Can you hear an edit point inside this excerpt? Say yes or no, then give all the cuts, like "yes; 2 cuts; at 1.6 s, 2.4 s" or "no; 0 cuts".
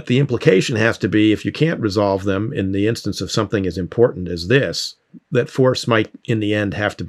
yes; 1 cut; at 5.2 s